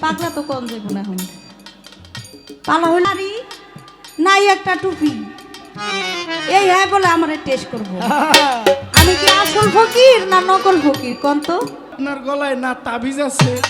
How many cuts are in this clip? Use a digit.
2